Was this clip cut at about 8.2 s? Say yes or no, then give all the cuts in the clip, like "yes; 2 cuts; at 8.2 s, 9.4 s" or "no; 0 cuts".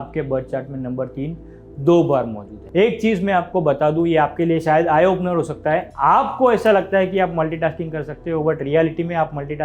no; 1 cut; at 2.6 s